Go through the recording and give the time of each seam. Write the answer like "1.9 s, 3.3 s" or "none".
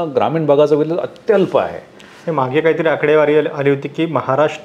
none